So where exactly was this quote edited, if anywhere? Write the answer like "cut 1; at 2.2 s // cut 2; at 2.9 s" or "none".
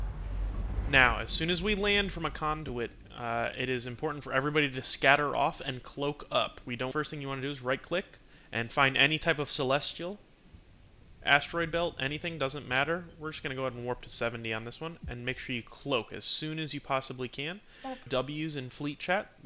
cut 1; at 6.9 s // cut 2; at 18.1 s

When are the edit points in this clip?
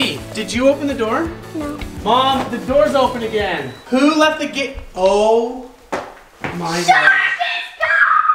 none

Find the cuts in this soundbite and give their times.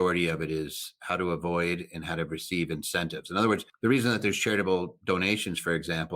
cut 1; at 0.9 s // cut 2; at 3.7 s

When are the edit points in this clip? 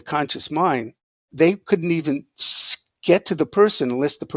cut 1; at 1.3 s

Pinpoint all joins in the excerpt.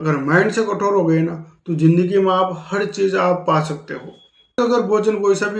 cut 1; at 4.6 s

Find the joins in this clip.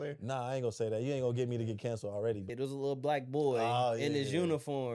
cut 1; at 2.5 s

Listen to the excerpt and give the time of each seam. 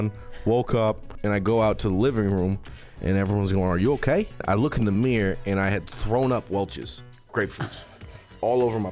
cut 1; at 1.1 s // cut 2; at 4.4 s

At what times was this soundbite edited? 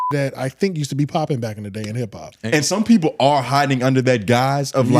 cut 1; at 2.3 s

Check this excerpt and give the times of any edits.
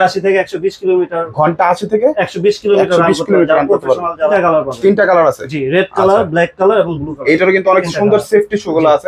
cut 1; at 4.3 s

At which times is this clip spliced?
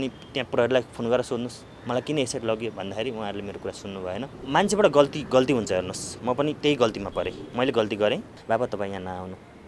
cut 1; at 4.3 s // cut 2; at 8.3 s

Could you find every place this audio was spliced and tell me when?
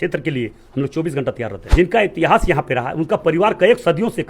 cut 1; at 1.5 s

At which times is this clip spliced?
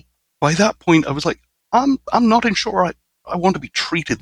none

